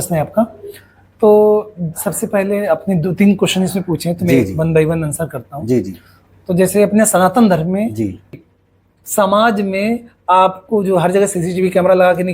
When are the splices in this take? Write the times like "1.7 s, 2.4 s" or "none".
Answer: 8.4 s